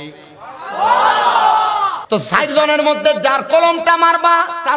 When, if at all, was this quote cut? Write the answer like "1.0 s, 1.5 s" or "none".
2.0 s